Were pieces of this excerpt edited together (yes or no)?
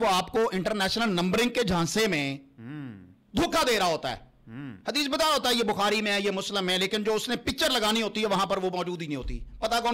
no